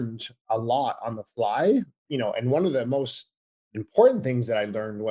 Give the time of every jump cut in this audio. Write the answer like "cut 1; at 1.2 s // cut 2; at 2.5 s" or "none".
cut 1; at 2.0 s